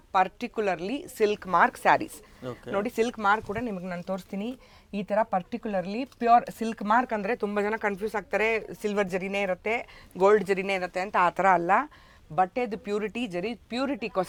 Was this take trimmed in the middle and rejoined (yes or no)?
no